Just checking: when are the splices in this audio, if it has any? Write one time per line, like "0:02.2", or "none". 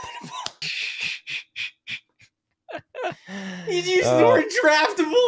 none